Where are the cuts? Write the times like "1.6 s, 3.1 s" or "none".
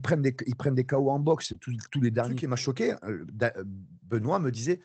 2.4 s